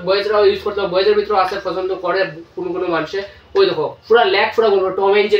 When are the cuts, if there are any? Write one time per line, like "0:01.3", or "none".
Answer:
none